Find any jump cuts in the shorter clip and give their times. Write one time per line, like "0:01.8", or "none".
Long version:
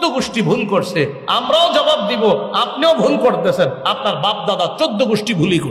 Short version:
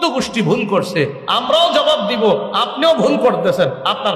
none